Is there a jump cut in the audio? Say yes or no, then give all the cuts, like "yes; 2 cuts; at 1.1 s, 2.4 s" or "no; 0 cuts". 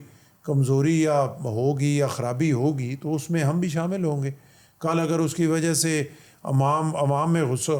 no; 0 cuts